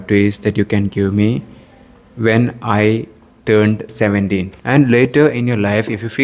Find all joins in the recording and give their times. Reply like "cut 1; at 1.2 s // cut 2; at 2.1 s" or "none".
cut 1; at 4.5 s